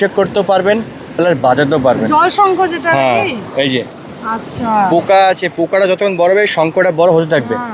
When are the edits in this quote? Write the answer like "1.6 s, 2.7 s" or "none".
none